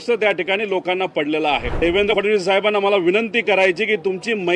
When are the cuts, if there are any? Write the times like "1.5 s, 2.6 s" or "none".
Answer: 1.7 s